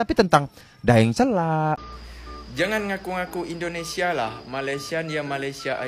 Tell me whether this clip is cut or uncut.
cut